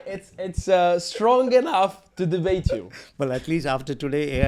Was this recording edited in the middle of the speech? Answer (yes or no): no